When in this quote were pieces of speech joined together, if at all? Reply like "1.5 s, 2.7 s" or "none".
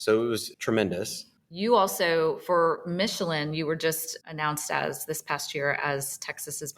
1.2 s